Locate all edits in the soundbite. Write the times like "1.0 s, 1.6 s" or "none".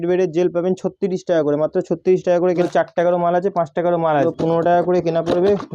2.6 s, 4.3 s